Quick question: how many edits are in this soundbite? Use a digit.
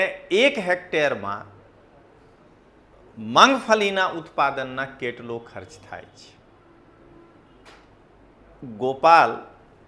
0